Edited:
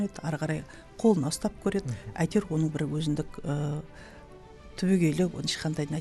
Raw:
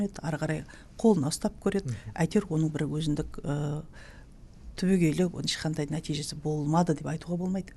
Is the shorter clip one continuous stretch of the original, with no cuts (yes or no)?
yes